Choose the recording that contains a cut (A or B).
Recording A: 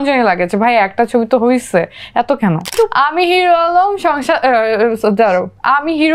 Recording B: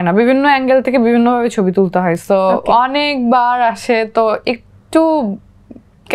A